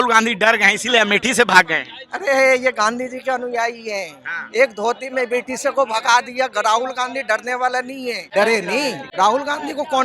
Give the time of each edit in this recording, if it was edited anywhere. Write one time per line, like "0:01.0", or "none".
0:08.2
0:09.0